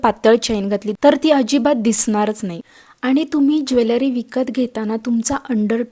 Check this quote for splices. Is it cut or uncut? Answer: uncut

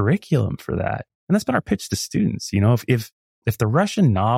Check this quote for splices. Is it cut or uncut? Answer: cut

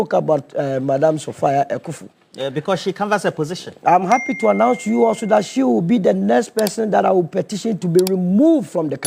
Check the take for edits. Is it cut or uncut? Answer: uncut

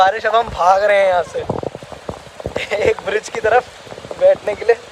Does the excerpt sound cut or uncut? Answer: uncut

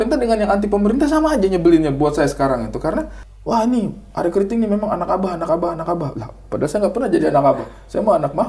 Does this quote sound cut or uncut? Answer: cut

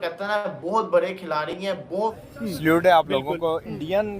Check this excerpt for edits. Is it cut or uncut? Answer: cut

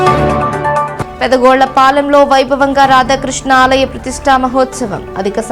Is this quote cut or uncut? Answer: cut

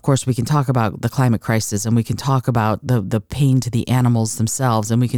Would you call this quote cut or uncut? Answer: uncut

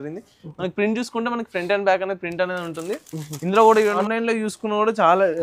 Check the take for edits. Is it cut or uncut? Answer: cut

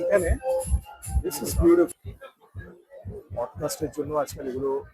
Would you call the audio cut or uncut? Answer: cut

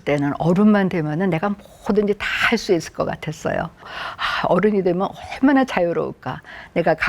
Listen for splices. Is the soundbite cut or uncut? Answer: cut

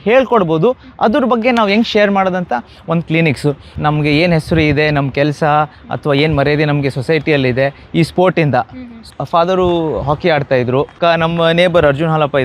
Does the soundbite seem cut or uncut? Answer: cut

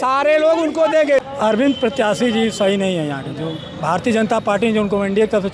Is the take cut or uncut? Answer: cut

